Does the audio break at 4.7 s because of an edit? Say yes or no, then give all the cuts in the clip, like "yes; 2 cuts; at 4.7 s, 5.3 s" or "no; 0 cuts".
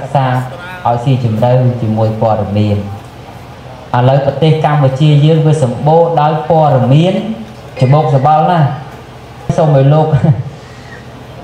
no; 3 cuts; at 3.4 s, 7.7 s, 9.5 s